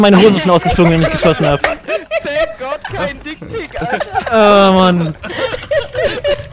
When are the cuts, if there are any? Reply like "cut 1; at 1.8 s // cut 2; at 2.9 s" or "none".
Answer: none